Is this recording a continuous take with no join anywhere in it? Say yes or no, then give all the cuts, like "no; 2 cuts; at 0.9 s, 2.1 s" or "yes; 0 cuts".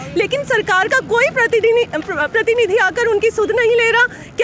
yes; 0 cuts